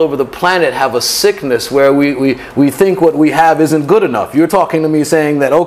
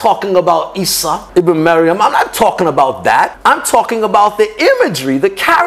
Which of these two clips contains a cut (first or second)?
second